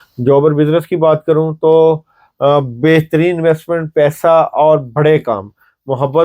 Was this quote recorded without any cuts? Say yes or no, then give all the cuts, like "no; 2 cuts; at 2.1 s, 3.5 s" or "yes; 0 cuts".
yes; 0 cuts